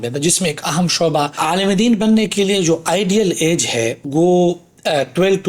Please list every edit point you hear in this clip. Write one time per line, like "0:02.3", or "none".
0:01.3
0:04.0